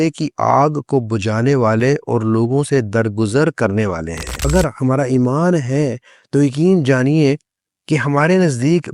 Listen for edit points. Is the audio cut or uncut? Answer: cut